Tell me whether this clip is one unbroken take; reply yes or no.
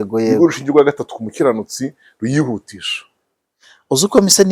yes